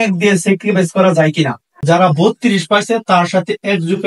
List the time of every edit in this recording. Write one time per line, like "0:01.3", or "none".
0:01.7

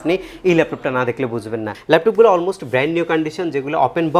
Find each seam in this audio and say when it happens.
0:01.8

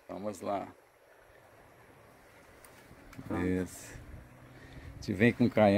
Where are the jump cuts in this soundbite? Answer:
none

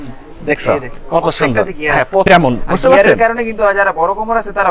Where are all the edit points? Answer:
0:02.3

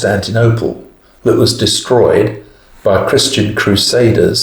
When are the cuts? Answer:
none

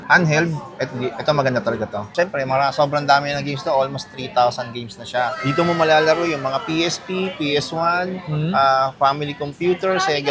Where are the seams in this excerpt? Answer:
0:02.1

